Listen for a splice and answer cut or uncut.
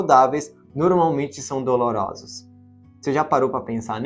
uncut